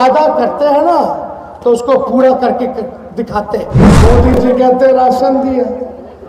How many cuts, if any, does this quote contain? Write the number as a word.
one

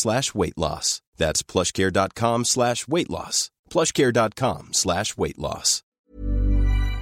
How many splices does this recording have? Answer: one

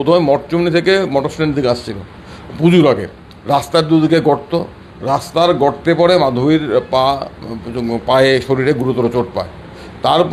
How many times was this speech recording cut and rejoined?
zero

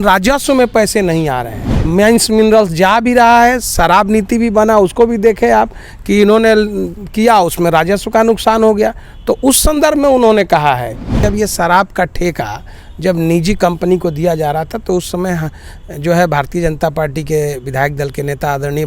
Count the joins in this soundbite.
two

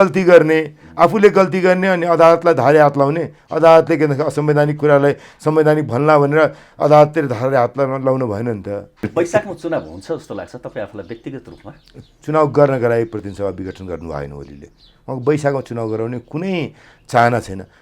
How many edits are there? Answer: one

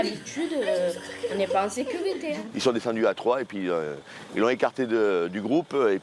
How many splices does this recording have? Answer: one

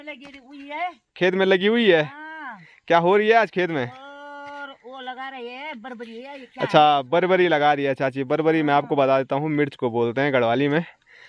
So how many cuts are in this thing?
zero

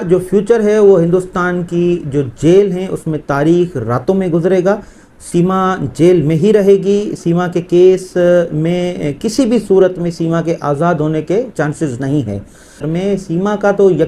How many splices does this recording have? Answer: one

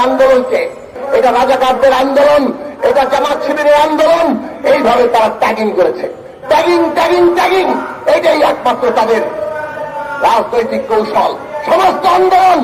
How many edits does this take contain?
one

